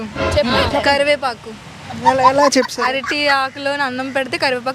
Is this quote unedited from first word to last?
yes; 0 cuts

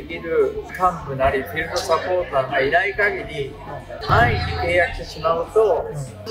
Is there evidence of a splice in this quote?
no; 0 cuts

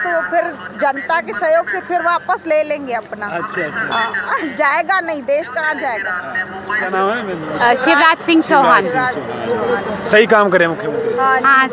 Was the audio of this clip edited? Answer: yes; 1 cut; at 6.9 s

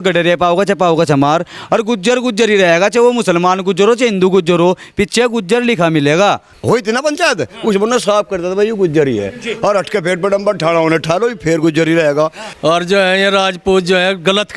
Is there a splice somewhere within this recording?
yes; 2 cuts; at 6.5 s, 12.5 s

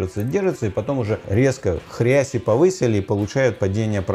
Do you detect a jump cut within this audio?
yes; 1 cut; at 1.3 s

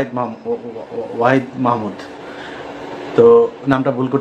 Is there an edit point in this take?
no; 0 cuts

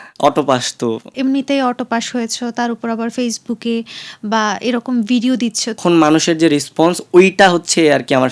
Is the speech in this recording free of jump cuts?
no; 2 cuts; at 1.1 s, 5.8 s

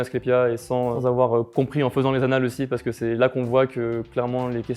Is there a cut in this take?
yes; 1 cut; at 1.0 s

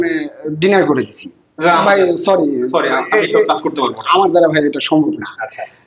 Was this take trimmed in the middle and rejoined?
no; 0 cuts

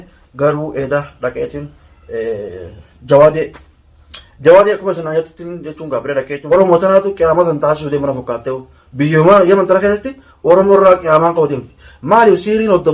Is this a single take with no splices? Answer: no; 1 cut; at 6.4 s

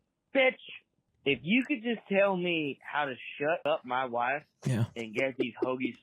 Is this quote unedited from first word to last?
no; 2 cuts; at 1.1 s, 3.6 s

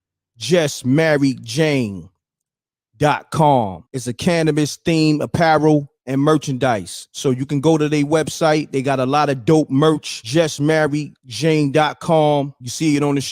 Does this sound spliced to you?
yes; 1 cut; at 1.9 s

